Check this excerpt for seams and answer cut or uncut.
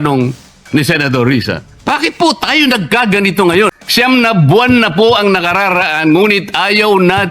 cut